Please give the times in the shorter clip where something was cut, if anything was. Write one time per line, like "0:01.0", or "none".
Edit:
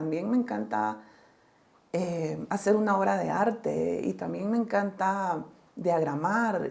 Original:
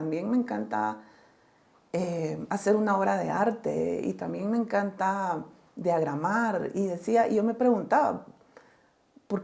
none

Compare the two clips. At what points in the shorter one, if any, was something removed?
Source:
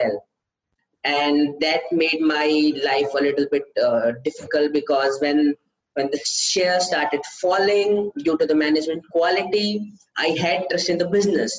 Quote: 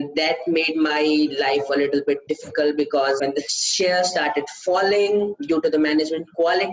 0:02.2
0:03.2

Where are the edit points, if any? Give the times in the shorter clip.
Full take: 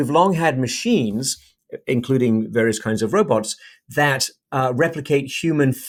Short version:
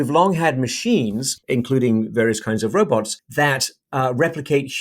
0:01.3
0:03.2

